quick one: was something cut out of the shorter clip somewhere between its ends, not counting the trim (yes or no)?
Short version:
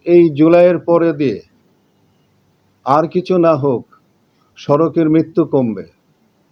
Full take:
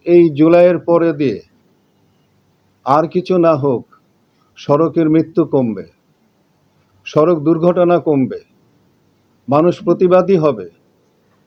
no